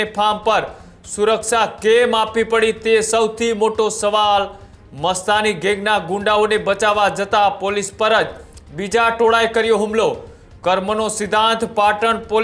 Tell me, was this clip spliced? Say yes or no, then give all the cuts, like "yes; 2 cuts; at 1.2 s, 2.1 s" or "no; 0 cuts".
no; 0 cuts